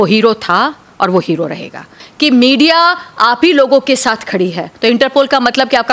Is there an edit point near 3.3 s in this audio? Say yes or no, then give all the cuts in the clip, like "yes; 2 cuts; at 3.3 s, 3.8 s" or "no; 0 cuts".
no; 2 cuts; at 2.0 s, 4.7 s